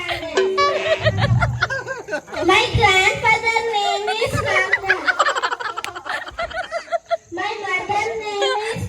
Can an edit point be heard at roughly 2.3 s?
yes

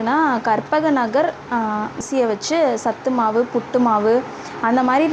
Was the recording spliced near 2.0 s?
yes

